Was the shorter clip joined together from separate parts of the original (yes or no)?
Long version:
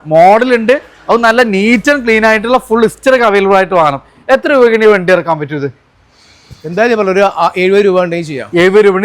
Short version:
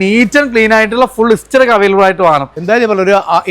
yes